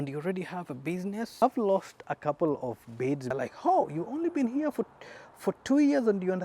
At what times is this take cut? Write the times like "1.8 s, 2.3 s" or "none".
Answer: 1.4 s, 3.3 s